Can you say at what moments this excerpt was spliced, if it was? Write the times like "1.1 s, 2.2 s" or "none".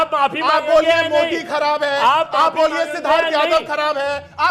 3.6 s